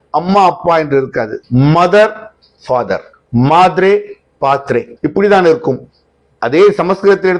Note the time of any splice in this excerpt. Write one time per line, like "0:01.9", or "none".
0:01.4
0:03.1
0:04.9